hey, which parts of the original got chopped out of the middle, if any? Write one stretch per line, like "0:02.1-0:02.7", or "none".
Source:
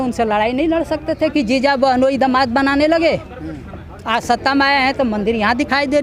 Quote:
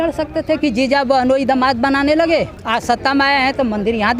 0:03.3-0:04.0